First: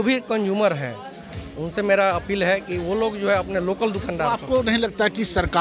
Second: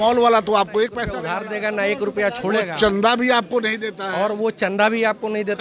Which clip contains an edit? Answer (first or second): second